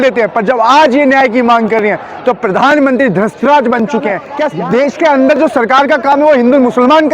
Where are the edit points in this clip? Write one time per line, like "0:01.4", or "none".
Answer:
0:04.3